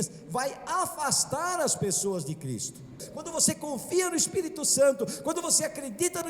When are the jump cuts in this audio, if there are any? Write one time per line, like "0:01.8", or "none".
0:03.1